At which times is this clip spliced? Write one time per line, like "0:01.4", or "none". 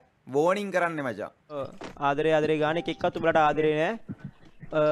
0:01.6